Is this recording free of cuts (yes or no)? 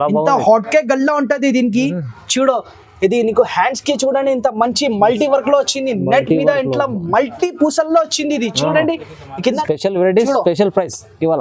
no